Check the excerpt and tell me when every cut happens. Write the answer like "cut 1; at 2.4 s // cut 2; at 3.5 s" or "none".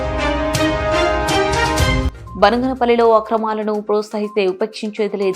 cut 1; at 2.0 s